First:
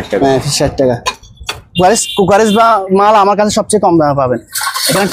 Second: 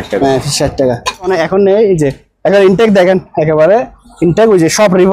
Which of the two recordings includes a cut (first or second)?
second